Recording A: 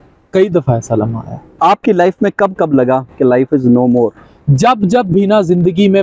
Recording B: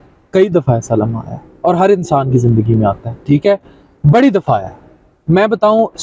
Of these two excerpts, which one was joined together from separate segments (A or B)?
A